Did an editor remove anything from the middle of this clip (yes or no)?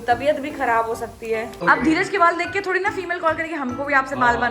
yes